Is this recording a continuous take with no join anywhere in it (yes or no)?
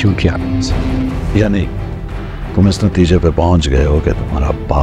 no